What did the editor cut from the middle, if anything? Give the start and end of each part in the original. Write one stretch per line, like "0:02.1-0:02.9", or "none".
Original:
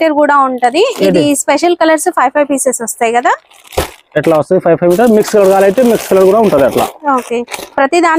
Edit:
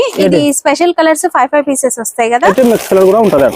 0:03.3-0:05.7

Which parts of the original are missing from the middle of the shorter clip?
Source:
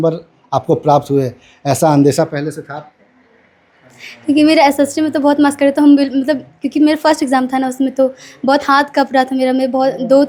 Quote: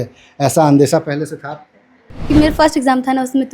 0:03.4-0:06.6

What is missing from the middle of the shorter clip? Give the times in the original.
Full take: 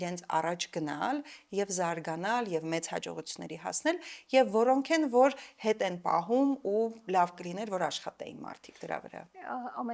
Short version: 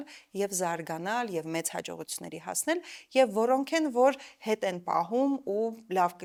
none

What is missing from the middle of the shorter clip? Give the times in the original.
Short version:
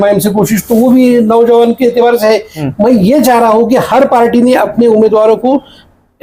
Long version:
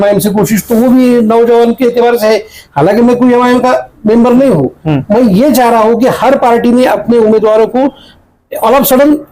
0:02.6-0:04.9

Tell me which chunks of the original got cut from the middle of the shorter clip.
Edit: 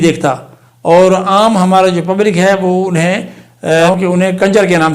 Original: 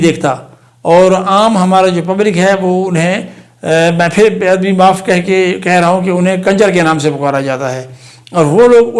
0:04.0-0:06.0

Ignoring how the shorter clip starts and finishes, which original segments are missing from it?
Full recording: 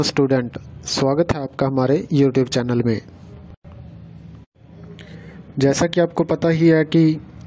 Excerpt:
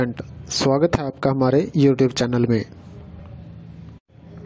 0:03.5-0:03.6

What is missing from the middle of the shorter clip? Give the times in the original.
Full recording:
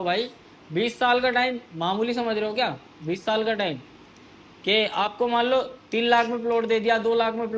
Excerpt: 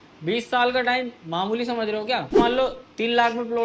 0:02.9-0:05.3

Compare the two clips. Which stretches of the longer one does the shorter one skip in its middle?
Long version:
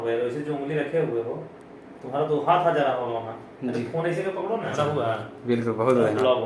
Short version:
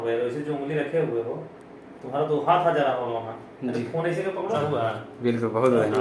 0:04.6-0:04.8

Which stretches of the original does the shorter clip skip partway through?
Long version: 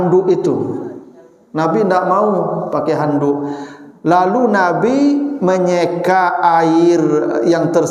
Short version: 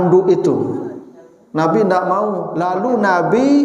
0:02.5-0:04.0

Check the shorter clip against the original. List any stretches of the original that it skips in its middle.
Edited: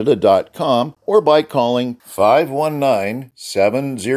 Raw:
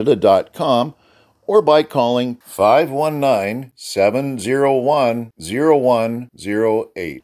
0:01.0-0:01.4

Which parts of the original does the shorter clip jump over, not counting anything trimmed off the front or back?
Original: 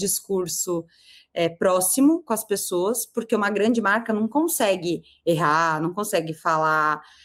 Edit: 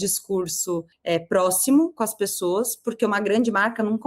0:00.9-0:01.2

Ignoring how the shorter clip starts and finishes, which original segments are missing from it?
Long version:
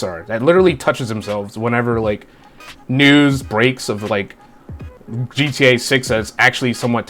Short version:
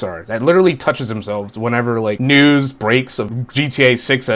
0:02.2-0:02.9
0:04.0-0:05.1

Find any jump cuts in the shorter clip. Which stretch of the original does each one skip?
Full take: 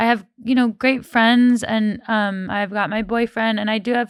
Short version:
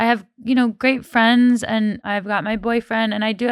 0:02.0-0:02.5

